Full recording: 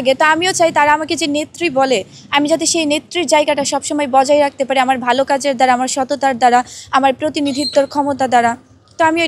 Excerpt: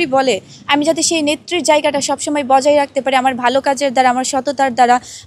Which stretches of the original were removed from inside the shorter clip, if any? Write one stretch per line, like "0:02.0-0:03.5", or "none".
none